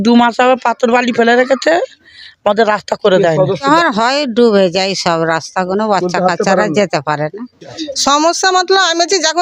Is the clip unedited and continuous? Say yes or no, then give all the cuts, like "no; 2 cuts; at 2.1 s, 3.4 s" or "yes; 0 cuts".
no; 2 cuts; at 3.6 s, 7.9 s